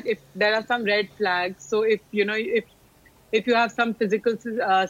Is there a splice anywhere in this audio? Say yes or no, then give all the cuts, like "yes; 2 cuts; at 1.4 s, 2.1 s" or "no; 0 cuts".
no; 0 cuts